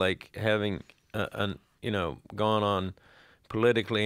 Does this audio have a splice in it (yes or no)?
yes